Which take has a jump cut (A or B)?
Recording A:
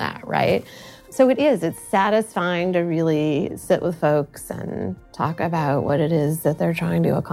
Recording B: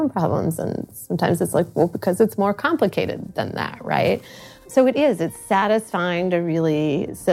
A